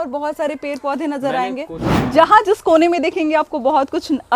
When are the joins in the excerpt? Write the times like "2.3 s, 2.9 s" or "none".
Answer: 1.9 s